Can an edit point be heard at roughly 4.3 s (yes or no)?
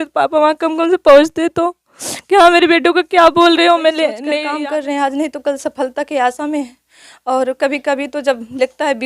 yes